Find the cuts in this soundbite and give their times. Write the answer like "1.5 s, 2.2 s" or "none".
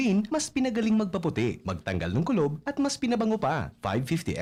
none